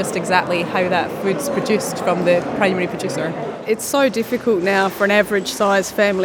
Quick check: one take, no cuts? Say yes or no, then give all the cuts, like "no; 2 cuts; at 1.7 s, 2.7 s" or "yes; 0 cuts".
no; 1 cut; at 3.6 s